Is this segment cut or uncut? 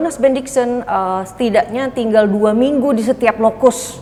uncut